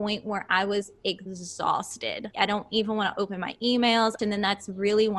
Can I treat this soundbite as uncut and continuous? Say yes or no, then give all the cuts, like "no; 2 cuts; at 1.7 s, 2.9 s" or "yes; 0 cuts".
no; 3 cuts; at 1.3 s, 2.3 s, 4.2 s